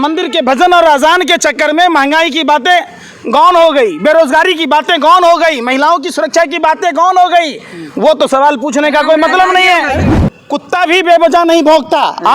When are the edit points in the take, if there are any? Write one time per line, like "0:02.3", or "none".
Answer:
0:10.1